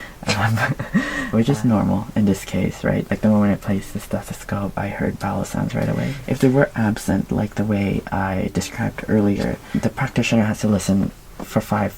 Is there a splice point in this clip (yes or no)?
yes